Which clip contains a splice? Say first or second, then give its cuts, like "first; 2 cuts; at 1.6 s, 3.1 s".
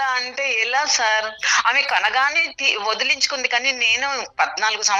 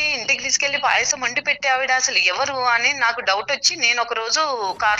first; 1 cut; at 1.5 s